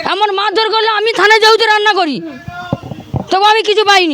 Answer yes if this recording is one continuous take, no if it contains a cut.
yes